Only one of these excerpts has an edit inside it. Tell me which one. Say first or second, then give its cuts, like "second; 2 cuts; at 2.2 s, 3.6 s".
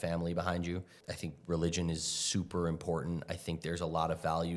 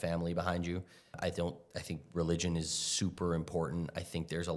first; 1 cut; at 1.0 s